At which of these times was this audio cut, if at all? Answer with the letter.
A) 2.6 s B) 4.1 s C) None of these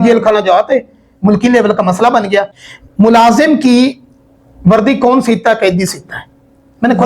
A